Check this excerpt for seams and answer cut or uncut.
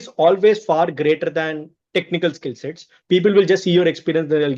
uncut